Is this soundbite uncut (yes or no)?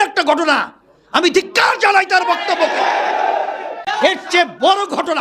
no